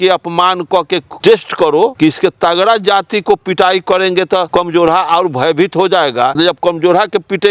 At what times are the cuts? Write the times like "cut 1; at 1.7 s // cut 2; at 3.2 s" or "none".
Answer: cut 1; at 1.1 s // cut 2; at 1.9 s // cut 3; at 4.5 s // cut 4; at 6.4 s

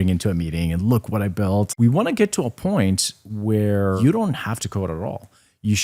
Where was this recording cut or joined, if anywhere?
cut 1; at 1.7 s // cut 2; at 4.0 s

